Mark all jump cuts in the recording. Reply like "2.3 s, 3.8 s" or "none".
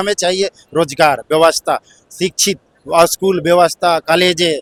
none